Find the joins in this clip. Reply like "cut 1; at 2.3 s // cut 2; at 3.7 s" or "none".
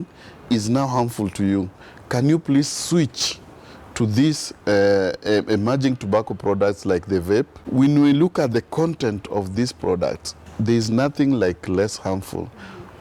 cut 1; at 7.6 s